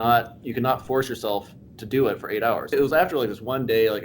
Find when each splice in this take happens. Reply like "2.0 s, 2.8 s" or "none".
2.7 s